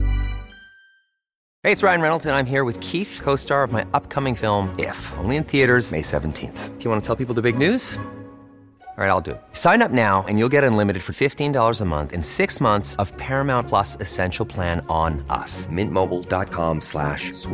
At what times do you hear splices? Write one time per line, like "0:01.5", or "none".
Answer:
0:01.5